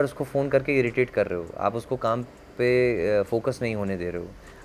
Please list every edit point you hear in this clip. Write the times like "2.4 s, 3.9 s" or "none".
none